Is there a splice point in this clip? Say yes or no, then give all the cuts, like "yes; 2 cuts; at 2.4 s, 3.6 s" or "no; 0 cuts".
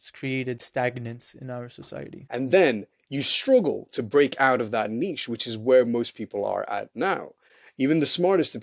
yes; 1 cut; at 2.1 s